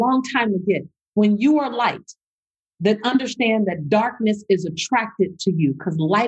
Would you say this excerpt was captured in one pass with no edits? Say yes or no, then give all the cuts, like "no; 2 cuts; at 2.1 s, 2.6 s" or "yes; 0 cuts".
yes; 0 cuts